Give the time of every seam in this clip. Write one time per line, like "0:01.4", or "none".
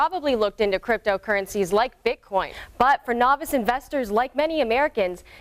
0:02.6